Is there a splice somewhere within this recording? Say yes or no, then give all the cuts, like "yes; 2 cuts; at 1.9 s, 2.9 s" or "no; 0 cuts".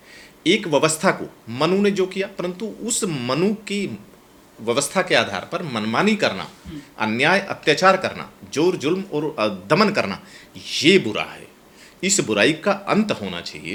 no; 0 cuts